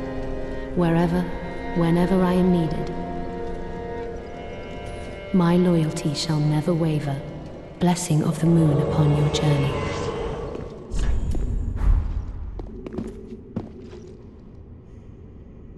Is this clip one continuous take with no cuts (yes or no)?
yes